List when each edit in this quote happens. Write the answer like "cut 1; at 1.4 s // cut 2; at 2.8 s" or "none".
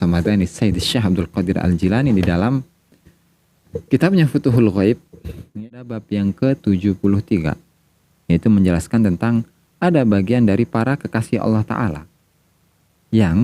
cut 1; at 5.4 s